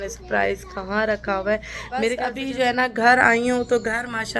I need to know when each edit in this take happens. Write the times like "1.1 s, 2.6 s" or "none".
2.3 s